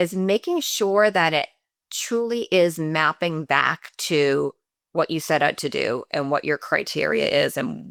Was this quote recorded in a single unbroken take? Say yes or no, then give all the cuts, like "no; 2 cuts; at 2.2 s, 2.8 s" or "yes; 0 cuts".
yes; 0 cuts